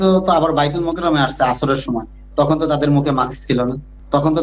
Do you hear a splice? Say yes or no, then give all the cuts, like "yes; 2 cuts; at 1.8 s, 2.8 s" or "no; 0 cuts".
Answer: no; 0 cuts